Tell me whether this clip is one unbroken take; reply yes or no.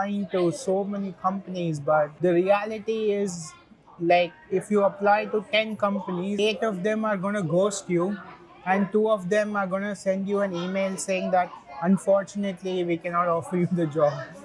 yes